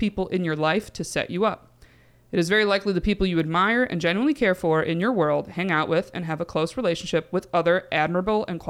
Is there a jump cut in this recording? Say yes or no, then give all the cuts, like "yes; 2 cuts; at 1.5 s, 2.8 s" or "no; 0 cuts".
no; 0 cuts